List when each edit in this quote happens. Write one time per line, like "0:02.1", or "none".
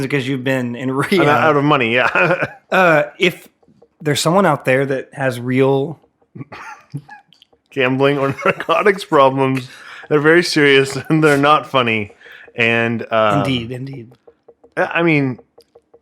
0:02.5